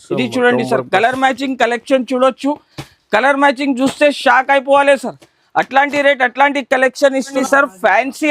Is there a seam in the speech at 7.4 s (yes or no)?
yes